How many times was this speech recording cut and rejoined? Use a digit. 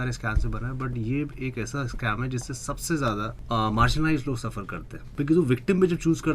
2